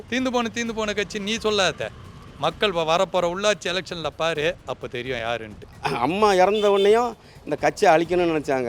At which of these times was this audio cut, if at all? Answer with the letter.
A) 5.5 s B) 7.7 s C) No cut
A